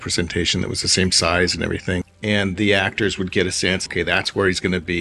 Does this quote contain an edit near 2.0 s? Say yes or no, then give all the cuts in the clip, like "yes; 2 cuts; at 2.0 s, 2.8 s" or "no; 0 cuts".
yes; 2 cuts; at 2.0 s, 3.9 s